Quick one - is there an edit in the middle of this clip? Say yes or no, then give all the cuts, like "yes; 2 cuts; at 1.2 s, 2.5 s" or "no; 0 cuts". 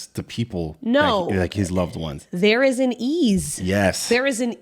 no; 0 cuts